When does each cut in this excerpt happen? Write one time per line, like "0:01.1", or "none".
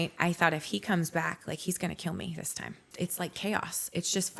0:02.9

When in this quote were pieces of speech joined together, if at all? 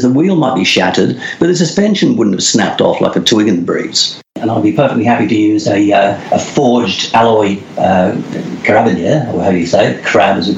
0:04.3

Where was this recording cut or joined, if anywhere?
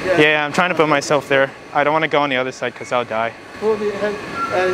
0:03.5

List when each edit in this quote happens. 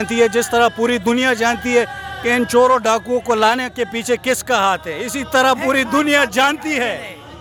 none

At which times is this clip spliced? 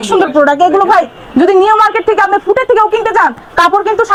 none

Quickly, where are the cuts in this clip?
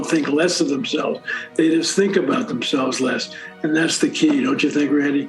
none

